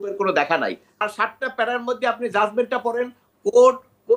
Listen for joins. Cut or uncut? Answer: cut